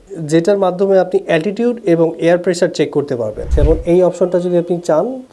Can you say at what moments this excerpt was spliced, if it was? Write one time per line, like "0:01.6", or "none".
0:03.5